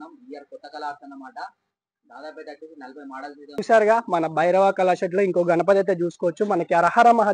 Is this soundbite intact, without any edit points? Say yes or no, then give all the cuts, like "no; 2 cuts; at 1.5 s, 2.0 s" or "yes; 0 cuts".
no; 1 cut; at 3.6 s